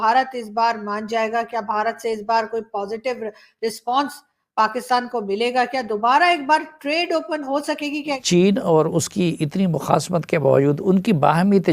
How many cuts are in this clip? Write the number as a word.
one